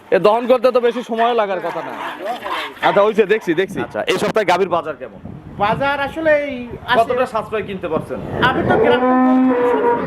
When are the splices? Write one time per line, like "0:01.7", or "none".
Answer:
0:03.9